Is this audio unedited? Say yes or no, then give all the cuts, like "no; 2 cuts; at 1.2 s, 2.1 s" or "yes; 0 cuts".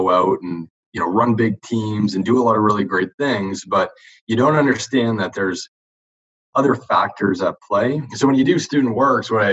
no; 1 cut; at 8.1 s